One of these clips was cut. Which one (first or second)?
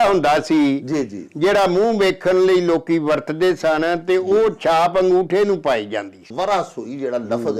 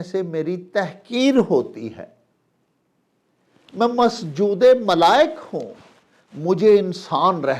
first